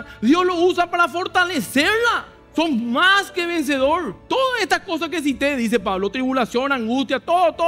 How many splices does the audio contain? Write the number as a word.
two